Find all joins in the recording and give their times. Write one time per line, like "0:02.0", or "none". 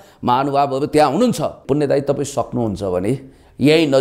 0:01.6

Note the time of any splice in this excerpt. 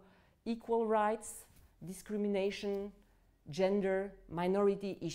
none

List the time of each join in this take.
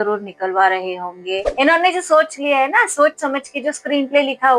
0:01.5

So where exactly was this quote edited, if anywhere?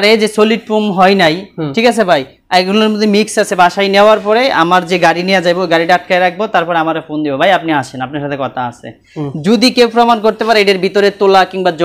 none

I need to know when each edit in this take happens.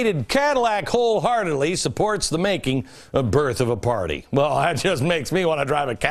none

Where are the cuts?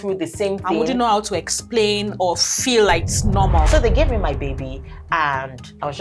0:03.7

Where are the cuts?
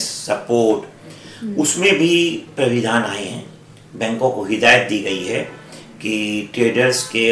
none

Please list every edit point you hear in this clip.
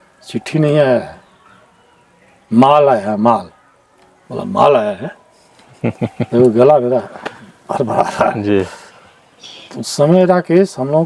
0:08.8

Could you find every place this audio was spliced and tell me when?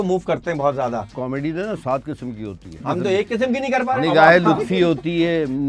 0:01.2
0:02.8

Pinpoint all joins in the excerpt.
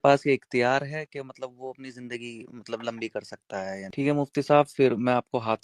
0:03.9

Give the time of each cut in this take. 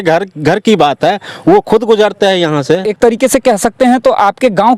0:02.9

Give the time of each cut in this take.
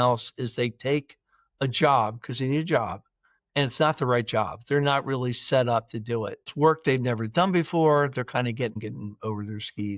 0:06.4
0:08.8

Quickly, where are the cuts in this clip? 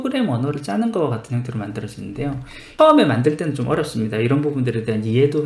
0:02.7

